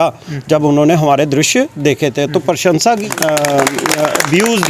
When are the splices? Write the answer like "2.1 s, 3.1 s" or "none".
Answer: 3.0 s

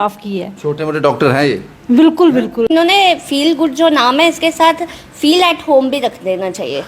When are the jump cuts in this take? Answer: 2.7 s

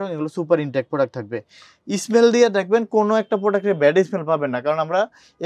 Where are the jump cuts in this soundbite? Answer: none

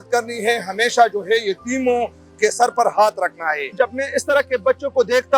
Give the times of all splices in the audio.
3.7 s

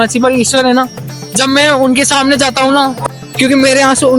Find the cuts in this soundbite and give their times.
3.0 s

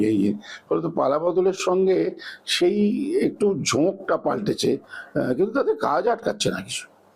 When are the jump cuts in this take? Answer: none

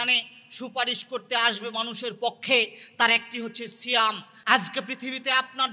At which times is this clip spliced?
4.3 s

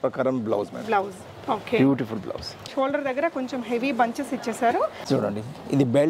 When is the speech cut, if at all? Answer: 2.7 s, 5.0 s

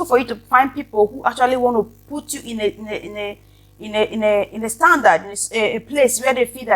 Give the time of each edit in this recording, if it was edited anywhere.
none

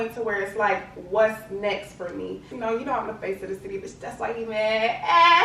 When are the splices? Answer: 2.5 s

